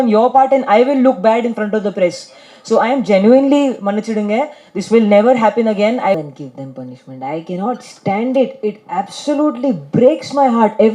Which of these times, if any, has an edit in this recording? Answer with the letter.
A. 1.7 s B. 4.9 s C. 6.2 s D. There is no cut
C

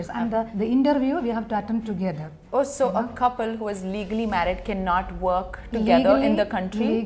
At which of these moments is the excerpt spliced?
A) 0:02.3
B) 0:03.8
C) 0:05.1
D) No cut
A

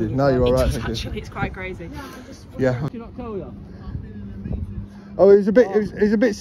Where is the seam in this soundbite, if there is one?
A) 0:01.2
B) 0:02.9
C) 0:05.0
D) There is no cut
B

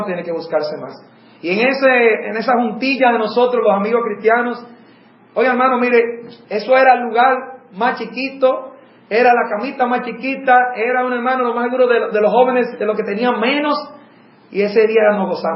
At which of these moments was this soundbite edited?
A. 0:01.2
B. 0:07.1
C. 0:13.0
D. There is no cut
D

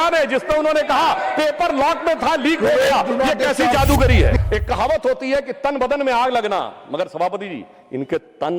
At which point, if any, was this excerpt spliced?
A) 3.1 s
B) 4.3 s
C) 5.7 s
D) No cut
B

